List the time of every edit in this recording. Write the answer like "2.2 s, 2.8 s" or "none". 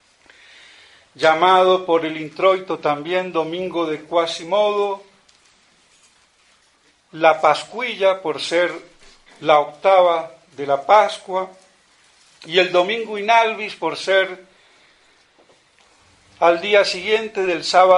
none